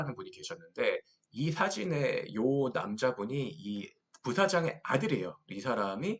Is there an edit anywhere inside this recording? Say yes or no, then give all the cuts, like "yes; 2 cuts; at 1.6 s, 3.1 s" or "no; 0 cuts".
no; 0 cuts